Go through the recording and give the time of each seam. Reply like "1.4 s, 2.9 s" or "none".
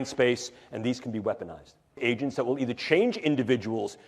2.0 s